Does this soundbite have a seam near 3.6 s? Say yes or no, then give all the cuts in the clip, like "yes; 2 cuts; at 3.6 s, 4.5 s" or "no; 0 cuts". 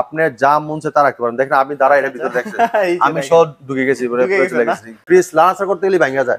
no; 1 cut; at 5.0 s